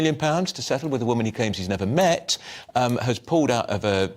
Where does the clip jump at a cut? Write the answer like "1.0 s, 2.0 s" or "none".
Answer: 1.5 s